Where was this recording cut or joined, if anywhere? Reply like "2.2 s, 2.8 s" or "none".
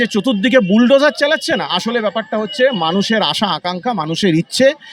none

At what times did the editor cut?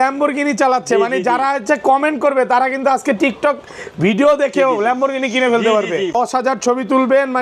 6.1 s

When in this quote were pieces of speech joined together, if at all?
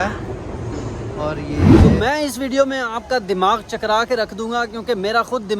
1.6 s

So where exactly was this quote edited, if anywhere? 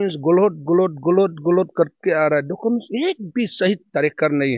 none

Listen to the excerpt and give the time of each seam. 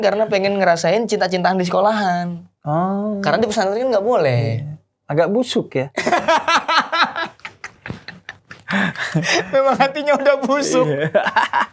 none

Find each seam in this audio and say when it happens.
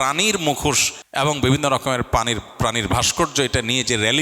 1.0 s

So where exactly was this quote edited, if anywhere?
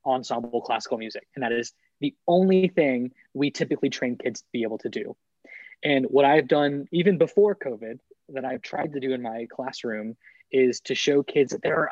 none

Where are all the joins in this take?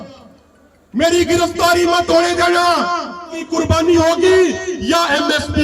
3.4 s

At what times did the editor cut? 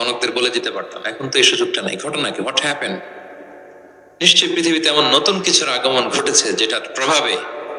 none

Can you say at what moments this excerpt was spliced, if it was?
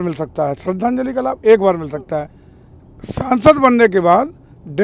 2.4 s

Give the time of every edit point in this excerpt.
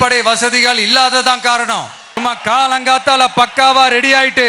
2.2 s

